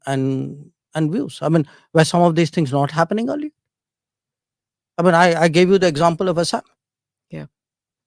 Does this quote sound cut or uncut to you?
uncut